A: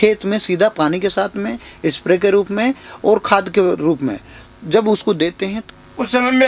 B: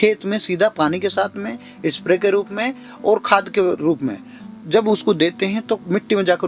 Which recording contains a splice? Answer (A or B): A